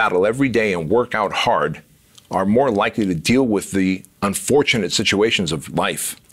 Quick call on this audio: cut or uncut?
uncut